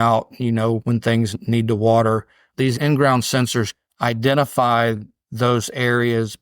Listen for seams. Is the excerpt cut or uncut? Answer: cut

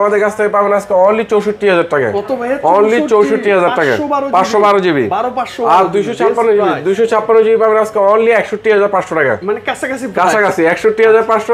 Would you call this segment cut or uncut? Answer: uncut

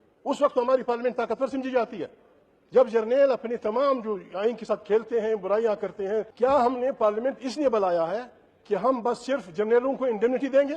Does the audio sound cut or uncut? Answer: cut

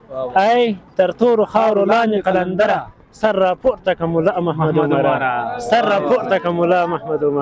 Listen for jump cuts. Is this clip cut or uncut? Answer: uncut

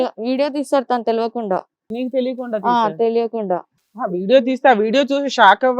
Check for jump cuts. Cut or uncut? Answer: cut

